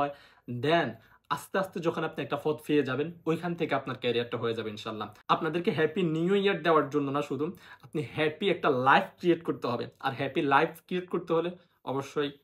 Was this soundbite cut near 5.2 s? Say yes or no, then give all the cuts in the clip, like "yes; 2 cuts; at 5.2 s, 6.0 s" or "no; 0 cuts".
yes; 1 cut; at 5.2 s